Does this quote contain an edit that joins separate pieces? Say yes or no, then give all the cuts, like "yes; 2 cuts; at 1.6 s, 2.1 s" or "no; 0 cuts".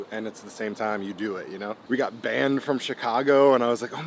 yes; 1 cut; at 1.7 s